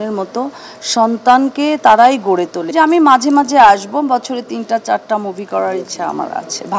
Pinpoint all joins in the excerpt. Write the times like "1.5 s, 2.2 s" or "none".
2.6 s